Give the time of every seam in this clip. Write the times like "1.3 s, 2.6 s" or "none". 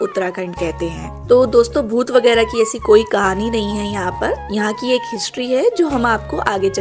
none